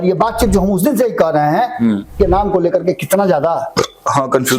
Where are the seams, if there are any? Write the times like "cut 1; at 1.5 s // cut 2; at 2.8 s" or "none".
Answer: cut 1; at 2.1 s

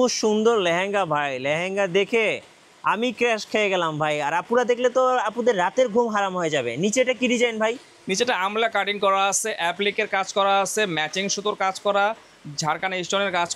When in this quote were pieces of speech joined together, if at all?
none

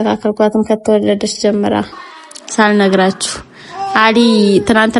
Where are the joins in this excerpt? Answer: cut 1; at 2.0 s

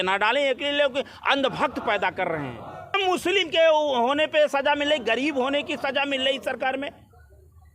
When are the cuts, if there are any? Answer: cut 1; at 3.0 s

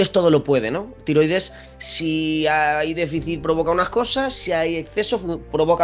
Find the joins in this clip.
none

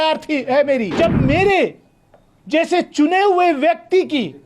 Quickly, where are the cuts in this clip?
cut 1; at 0.9 s

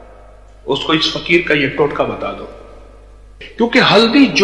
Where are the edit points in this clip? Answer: cut 1; at 3.4 s

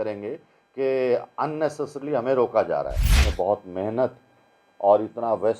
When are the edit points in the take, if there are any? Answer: cut 1; at 3.1 s

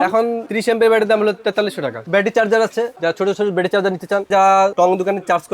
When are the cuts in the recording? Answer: cut 1; at 2.0 s // cut 2; at 4.3 s

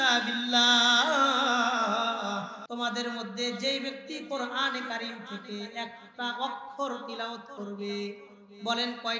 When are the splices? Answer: cut 1; at 2.6 s

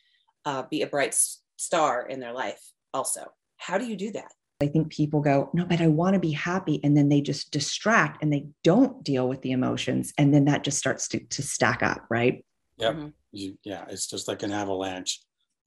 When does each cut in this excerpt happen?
cut 1; at 4.6 s

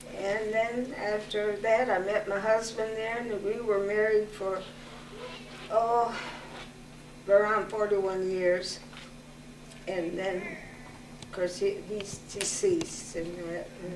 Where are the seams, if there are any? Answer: cut 1; at 7.7 s

